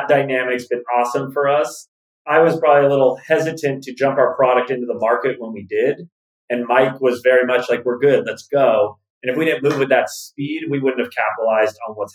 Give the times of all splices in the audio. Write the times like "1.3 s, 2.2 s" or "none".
none